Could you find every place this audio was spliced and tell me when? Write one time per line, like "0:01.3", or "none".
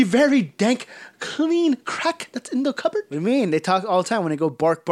0:03.1